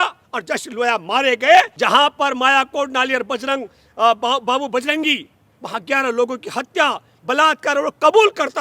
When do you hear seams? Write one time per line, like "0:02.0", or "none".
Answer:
0:01.7